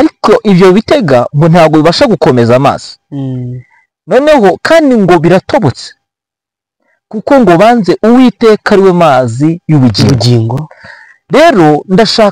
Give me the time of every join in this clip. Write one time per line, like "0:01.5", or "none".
none